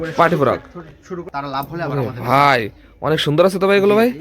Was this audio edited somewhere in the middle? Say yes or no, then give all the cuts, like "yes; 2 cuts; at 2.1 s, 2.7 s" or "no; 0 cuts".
yes; 1 cut; at 1.3 s